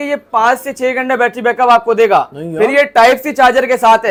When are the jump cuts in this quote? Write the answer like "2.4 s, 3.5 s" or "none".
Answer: none